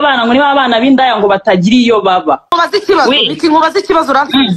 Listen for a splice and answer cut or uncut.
cut